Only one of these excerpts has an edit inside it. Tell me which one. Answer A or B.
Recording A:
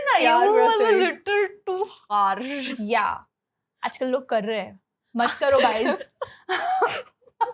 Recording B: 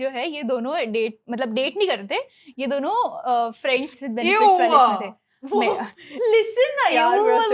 B